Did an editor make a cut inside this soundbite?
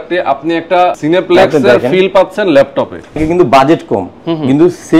yes; 2 cuts; at 1.0 s, 3.2 s

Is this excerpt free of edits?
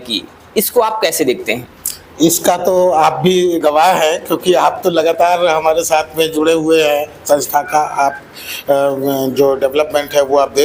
yes; 0 cuts

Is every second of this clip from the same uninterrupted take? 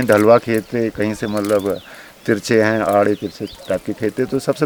yes; 0 cuts

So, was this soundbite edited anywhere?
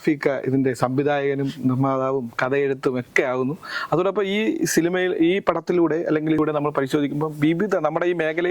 yes; 1 cut; at 6.4 s

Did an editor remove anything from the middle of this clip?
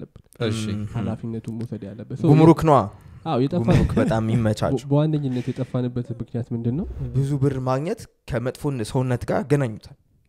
yes; 1 cut; at 7.0 s

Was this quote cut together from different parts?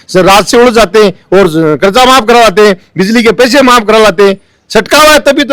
no; 0 cuts

